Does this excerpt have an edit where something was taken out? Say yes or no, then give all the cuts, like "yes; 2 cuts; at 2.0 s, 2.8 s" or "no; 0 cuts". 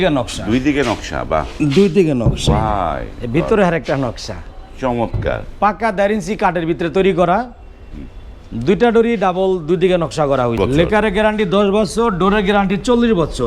yes; 1 cut; at 10.6 s